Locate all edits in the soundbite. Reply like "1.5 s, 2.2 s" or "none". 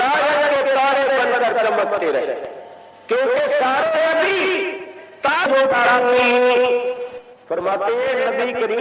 5.5 s